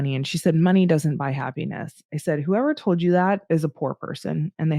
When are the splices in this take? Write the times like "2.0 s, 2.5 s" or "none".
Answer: 3.4 s